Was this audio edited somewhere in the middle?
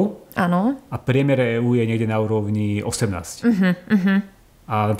no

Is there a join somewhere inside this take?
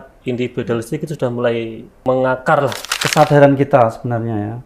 yes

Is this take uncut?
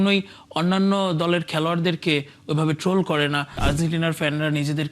no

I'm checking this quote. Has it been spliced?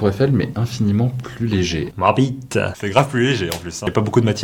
yes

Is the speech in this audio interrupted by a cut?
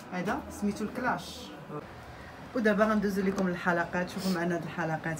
yes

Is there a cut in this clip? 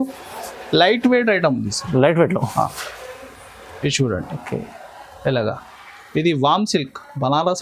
no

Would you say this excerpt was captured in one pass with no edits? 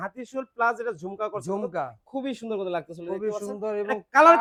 yes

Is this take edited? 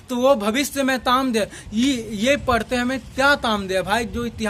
no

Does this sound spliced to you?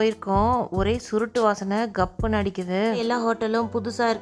yes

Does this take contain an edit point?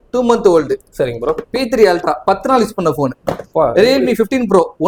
no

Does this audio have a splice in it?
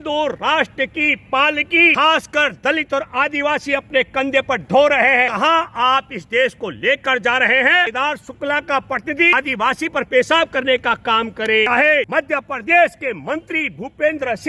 yes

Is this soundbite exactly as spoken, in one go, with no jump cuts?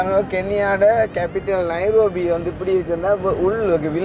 yes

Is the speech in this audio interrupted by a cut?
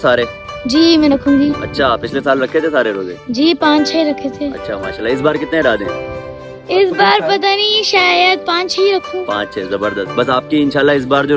no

